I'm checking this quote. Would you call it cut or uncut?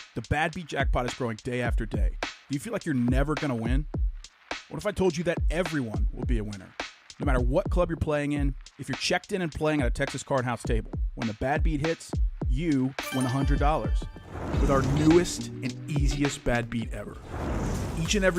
uncut